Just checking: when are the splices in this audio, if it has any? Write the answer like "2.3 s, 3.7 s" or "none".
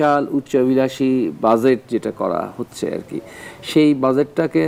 none